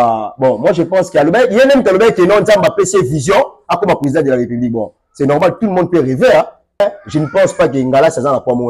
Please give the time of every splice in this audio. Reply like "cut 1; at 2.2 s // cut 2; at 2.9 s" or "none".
cut 1; at 6.8 s